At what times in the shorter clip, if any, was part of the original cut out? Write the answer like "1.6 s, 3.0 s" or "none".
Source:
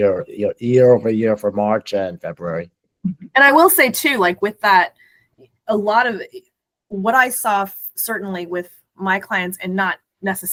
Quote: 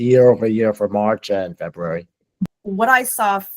2.6 s